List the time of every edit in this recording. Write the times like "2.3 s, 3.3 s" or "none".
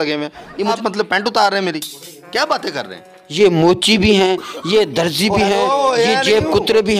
0.8 s, 3.2 s